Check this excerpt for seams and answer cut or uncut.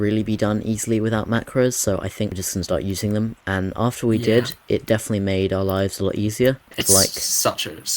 cut